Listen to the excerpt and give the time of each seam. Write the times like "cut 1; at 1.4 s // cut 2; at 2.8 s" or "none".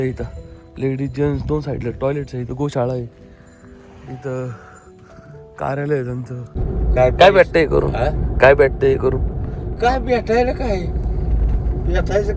cut 1; at 6.5 s